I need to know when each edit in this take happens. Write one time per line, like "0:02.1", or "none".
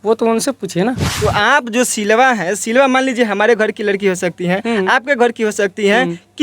0:01.1